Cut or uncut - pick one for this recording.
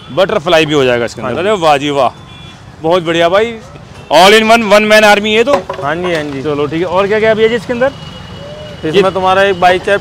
uncut